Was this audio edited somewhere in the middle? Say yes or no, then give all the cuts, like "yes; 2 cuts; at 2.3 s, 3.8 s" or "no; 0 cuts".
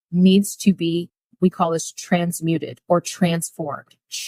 yes; 1 cut; at 1.2 s